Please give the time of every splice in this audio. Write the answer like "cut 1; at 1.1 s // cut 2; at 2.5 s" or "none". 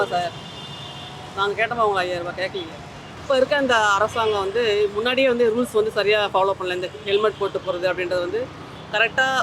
cut 1; at 3.1 s